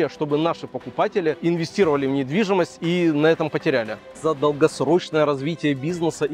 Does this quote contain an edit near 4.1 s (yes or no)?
yes